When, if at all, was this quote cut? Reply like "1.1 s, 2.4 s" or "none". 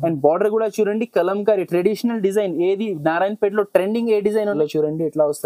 4.5 s

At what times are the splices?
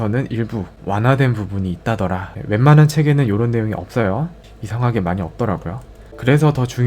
2.3 s

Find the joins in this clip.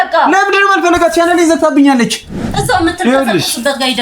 2.5 s

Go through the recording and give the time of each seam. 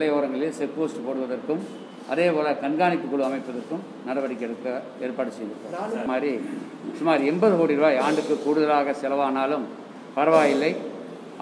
none

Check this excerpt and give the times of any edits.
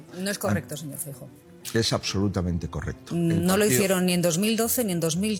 none

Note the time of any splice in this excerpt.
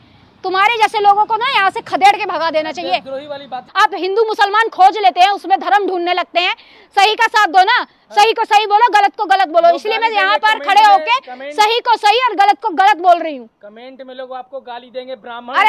3.6 s

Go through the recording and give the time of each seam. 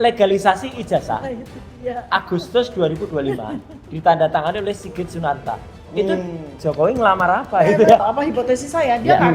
8.0 s

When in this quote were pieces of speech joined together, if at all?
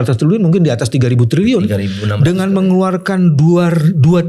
none

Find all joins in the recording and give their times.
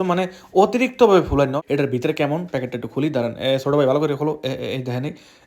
1.6 s

